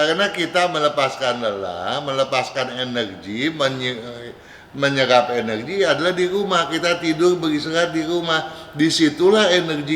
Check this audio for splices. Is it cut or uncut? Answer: uncut